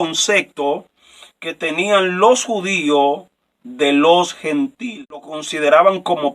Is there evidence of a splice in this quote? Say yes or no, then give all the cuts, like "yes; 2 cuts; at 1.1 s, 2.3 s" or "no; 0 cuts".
yes; 1 cut; at 5.4 s